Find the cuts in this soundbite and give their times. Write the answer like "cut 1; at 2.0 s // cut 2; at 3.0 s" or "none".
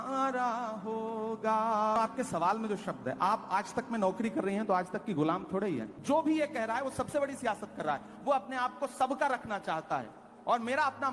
cut 1; at 2.0 s // cut 2; at 5.9 s